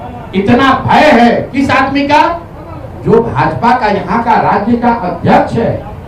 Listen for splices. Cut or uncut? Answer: uncut